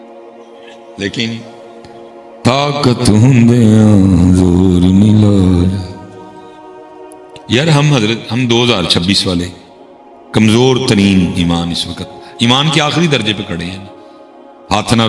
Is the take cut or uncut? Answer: cut